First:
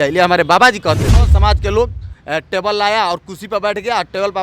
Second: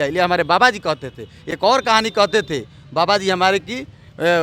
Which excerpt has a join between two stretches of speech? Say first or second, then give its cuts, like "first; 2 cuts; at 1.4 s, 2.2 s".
first; 1 cut; at 1.2 s